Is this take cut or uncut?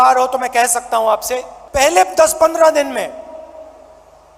cut